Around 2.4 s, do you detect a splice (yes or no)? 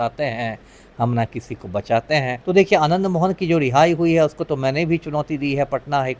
yes